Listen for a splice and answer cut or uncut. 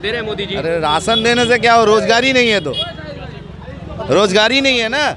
uncut